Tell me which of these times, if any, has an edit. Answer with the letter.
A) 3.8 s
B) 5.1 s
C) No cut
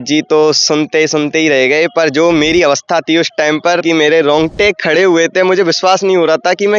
A